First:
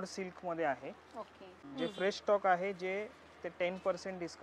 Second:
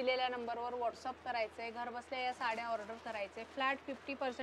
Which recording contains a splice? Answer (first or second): first